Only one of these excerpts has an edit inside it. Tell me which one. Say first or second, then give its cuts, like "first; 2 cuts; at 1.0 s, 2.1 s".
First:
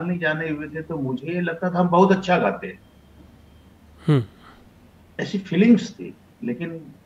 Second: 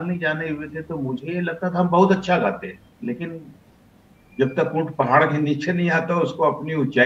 second; 1 cut; at 2.9 s